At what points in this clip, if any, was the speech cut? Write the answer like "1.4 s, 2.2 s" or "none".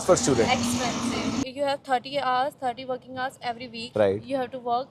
1.4 s